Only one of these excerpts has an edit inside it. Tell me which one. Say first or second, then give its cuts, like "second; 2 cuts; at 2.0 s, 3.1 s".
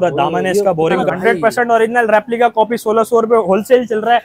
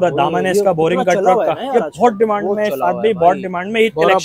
first; 1 cut; at 1.1 s